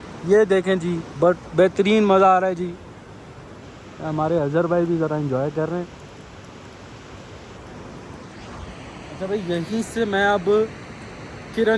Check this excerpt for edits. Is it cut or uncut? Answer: uncut